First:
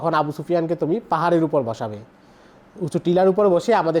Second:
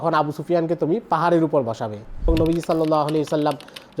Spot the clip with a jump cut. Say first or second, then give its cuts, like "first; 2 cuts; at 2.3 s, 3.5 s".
second; 1 cut; at 2.3 s